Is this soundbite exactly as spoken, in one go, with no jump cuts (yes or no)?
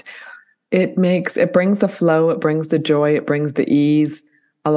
yes